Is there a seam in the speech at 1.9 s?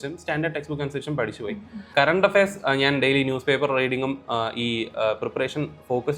yes; 1 cut; at 1.9 s

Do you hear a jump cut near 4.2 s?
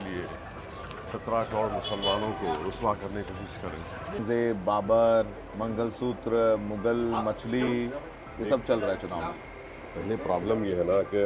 yes; 1 cut; at 4.2 s

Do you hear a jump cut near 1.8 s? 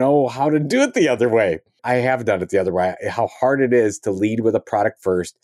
yes; 1 cut; at 1.8 s

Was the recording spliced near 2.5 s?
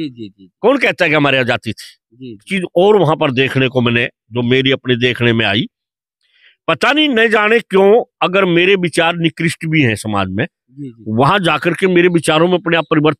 yes; 1 cut; at 2.5 s

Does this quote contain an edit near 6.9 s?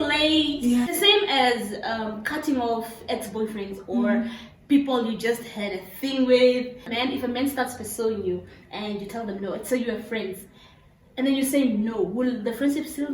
yes; 2 cuts; at 0.9 s, 6.9 s

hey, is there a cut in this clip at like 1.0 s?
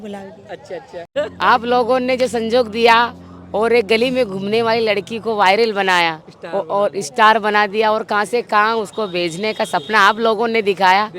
yes; 1 cut; at 1.0 s

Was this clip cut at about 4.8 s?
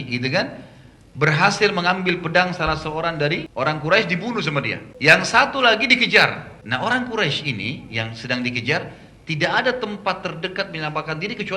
yes; 3 cuts; at 3.5 s, 4.8 s, 6.5 s

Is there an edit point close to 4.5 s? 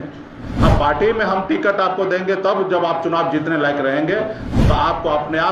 yes; 1 cut; at 4.5 s

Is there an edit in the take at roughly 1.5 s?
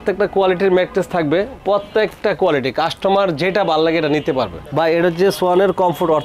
no; 1 cut; at 4.6 s

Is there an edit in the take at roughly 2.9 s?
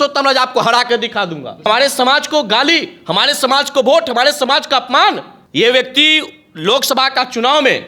no; 2 cuts; at 1.7 s, 5.3 s

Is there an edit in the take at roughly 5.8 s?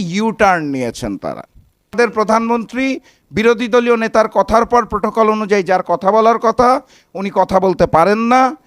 no; 1 cut; at 2.0 s

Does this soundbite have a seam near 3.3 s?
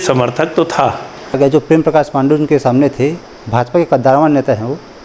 no; 1 cut; at 1.4 s

